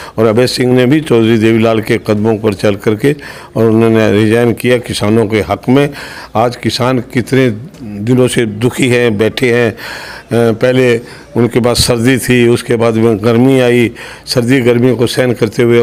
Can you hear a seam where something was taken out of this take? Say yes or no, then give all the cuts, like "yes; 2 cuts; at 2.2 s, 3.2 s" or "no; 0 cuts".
no; 0 cuts